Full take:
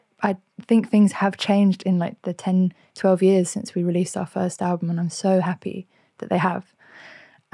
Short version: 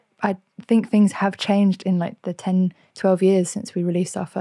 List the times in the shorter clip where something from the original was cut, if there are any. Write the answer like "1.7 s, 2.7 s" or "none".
none